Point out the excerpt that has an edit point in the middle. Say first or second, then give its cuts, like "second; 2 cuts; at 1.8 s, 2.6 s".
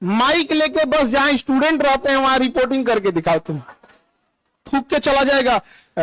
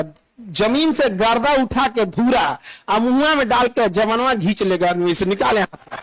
first; 1 cut; at 4.6 s